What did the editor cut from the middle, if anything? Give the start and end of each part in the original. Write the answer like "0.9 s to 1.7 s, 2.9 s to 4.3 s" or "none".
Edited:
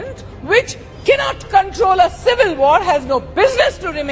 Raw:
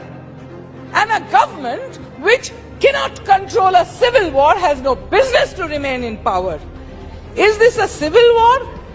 none